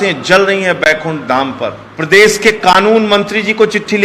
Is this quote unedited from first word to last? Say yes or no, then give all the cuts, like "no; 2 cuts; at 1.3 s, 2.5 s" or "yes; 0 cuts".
no; 1 cut; at 1.9 s